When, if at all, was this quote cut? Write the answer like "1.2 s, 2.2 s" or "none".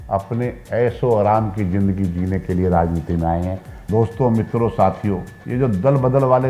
3.7 s

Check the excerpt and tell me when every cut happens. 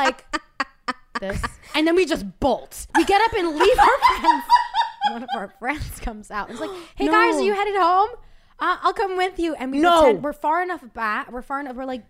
1.7 s, 2.8 s, 5.3 s

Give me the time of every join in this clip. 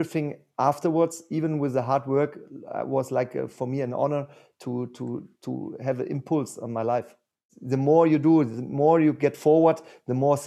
7.5 s

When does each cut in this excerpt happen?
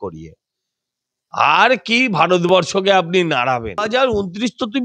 3.8 s

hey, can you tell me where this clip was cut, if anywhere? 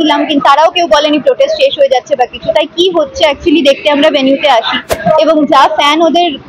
4.9 s

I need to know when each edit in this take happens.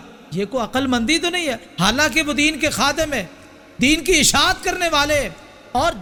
none

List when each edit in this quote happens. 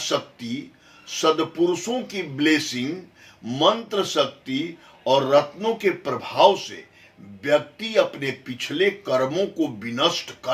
none

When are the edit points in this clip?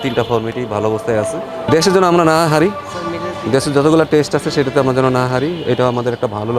1.6 s

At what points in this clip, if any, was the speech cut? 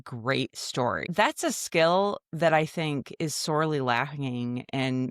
1.0 s

